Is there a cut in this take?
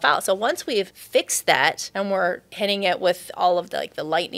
yes; 2 cuts; at 1.0 s, 1.8 s

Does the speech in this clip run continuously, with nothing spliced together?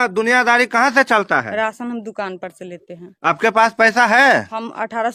yes; 0 cuts

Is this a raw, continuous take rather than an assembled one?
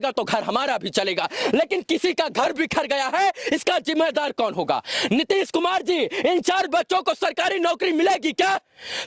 yes; 0 cuts

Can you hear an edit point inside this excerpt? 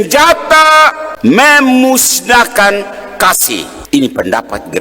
yes; 2 cuts; at 1.1 s, 3.7 s

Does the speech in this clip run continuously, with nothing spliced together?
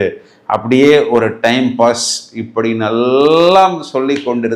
yes; 0 cuts

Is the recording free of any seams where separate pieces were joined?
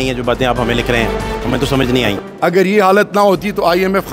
no; 1 cut; at 2.2 s

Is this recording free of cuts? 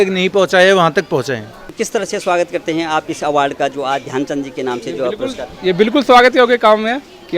no; 1 cut; at 1.7 s

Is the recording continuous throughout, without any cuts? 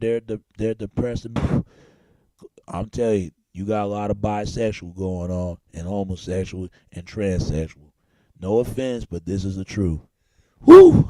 yes; 0 cuts

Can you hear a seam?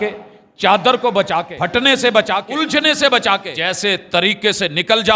yes; 3 cuts; at 1.5 s, 2.5 s, 3.5 s

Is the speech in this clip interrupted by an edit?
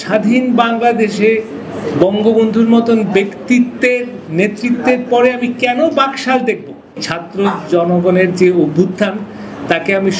yes; 1 cut; at 7.2 s

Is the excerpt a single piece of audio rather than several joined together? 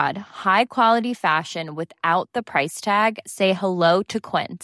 yes; 0 cuts

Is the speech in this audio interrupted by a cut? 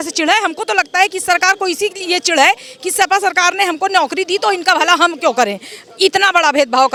no; 0 cuts

